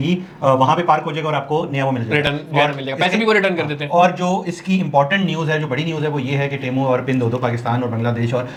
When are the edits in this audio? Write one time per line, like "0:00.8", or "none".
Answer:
none